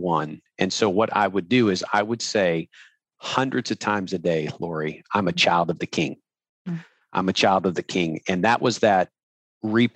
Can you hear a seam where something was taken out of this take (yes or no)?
no